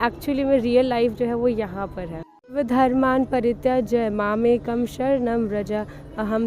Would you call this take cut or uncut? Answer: cut